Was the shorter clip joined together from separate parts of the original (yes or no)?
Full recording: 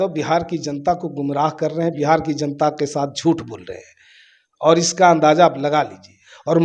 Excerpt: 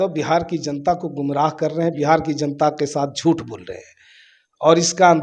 no